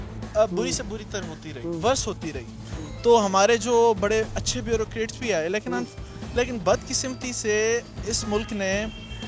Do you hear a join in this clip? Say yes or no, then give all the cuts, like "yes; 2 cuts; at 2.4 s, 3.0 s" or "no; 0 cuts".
no; 0 cuts